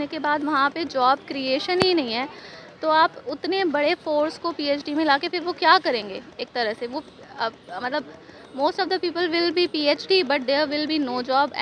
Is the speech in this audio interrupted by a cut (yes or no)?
no